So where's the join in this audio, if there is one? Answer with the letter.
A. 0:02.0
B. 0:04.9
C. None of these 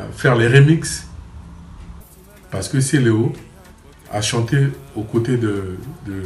A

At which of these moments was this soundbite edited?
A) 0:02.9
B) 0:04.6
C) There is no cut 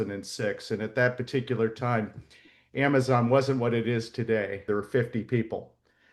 B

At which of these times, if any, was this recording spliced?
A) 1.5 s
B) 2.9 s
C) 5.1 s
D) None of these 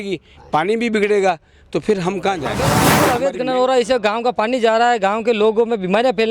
B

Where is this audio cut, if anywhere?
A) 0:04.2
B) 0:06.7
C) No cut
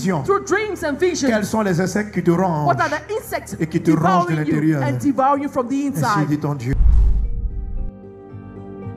B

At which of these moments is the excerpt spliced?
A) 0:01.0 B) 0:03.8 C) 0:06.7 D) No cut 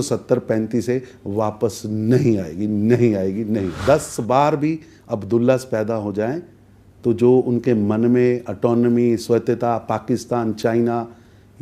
B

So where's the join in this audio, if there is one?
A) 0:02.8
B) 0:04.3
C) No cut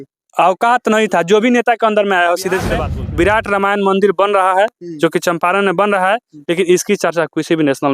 A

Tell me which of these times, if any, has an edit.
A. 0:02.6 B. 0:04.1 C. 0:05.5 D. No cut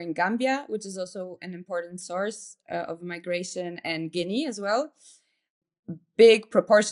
C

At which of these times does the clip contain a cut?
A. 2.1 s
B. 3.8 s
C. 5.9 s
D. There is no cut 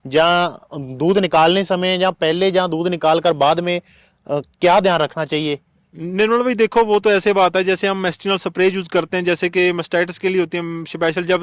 D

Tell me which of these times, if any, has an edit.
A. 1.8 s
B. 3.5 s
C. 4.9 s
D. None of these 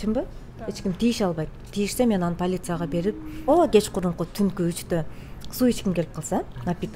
B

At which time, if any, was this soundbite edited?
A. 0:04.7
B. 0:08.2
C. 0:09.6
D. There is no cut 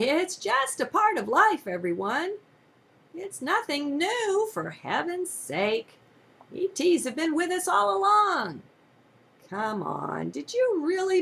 D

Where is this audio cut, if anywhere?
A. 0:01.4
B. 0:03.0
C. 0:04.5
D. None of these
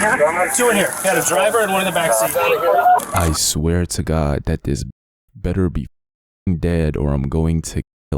B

